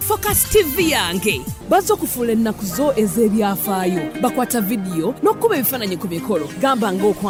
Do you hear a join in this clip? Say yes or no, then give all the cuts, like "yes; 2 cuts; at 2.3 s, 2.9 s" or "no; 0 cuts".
no; 0 cuts